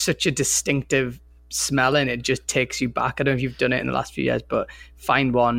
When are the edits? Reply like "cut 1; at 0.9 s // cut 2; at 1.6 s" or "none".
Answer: none

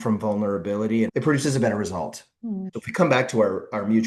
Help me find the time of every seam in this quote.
cut 1; at 1.1 s // cut 2; at 2.8 s

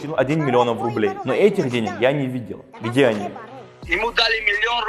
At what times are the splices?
cut 1; at 3.5 s

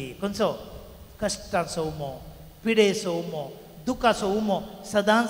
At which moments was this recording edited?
none

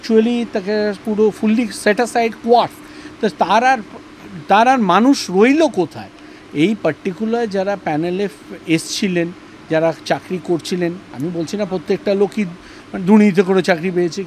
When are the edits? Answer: none

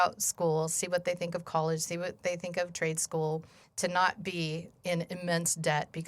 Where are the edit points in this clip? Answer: cut 1; at 4.7 s

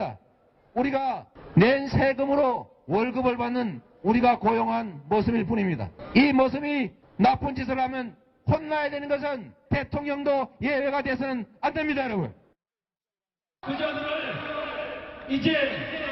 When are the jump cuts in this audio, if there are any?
cut 1; at 4.5 s

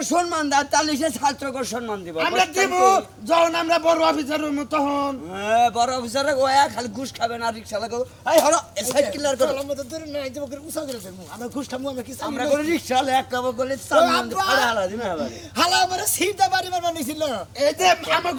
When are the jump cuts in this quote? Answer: none

